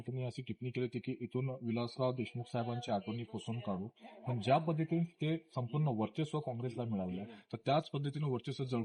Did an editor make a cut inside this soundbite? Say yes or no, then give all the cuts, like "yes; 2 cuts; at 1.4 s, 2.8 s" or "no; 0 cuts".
no; 0 cuts